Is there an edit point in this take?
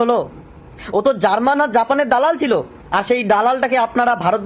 no; 0 cuts

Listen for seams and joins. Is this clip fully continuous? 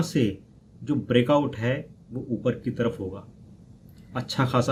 yes; 0 cuts

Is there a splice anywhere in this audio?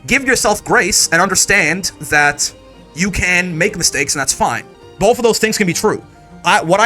yes; 1 cut; at 4.8 s

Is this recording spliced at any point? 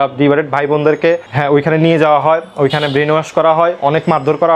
no; 0 cuts

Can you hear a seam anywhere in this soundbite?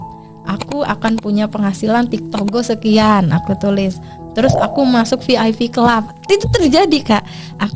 no; 0 cuts

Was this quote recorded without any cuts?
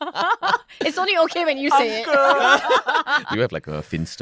no; 1 cut; at 3.3 s

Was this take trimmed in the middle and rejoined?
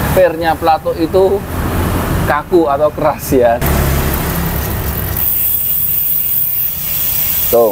yes; 1 cut; at 3.6 s

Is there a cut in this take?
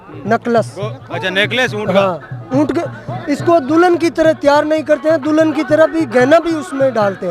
no; 0 cuts

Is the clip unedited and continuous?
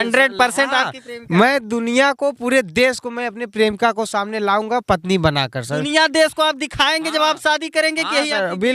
yes; 0 cuts

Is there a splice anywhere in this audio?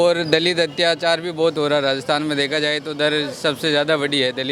no; 0 cuts

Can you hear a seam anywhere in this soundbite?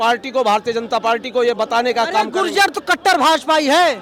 no; 0 cuts

